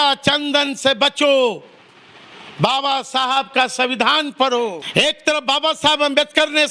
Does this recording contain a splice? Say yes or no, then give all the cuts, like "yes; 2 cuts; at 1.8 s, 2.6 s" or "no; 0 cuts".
yes; 1 cut; at 4.8 s